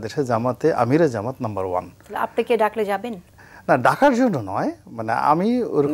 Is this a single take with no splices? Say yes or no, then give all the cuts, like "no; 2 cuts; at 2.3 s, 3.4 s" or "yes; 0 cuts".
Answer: yes; 0 cuts